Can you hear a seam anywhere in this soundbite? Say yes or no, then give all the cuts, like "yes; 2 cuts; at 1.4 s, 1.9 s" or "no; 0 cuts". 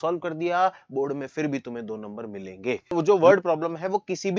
yes; 1 cut; at 2.9 s